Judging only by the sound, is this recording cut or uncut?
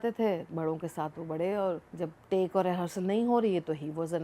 cut